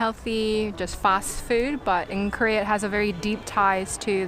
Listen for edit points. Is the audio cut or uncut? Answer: uncut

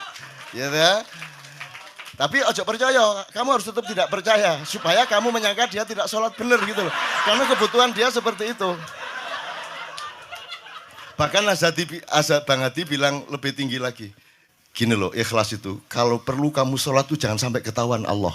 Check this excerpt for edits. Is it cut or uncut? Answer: uncut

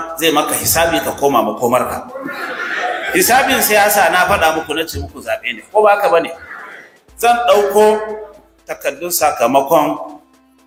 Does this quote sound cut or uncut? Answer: uncut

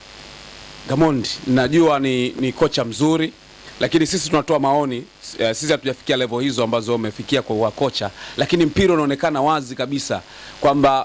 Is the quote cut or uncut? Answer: uncut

